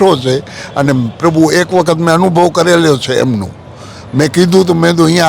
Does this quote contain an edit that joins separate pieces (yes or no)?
no